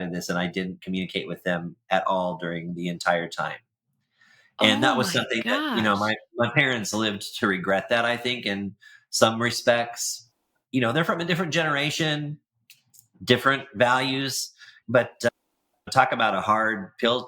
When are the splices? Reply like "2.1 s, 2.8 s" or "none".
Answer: 14.8 s